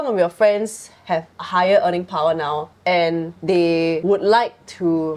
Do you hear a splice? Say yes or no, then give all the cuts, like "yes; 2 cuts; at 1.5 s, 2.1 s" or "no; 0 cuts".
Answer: yes; 3 cuts; at 1.4 s, 2.7 s, 3.9 s